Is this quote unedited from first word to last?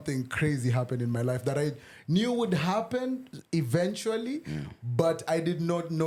yes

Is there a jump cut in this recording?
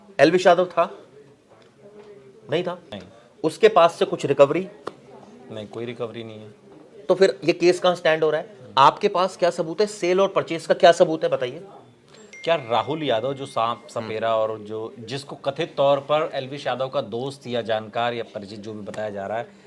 yes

